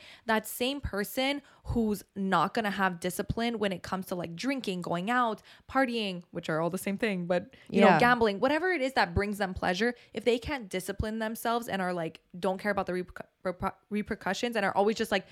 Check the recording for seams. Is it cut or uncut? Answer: uncut